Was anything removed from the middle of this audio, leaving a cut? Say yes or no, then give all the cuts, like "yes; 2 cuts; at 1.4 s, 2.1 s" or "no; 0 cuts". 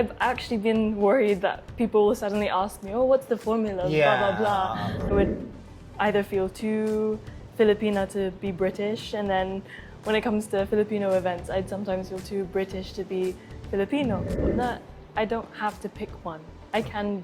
yes; 2 cuts; at 5.1 s, 14.4 s